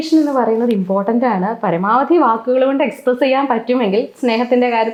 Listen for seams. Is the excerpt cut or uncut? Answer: uncut